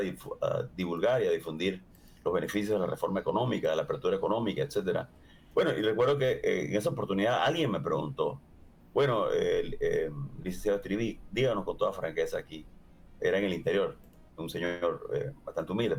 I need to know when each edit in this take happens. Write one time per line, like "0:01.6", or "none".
none